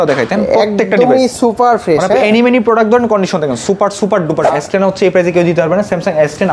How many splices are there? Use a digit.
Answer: 1